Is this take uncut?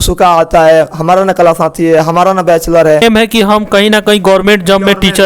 no; 1 cut; at 3.0 s

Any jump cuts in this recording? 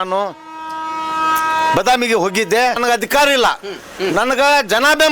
yes; 1 cut; at 2.8 s

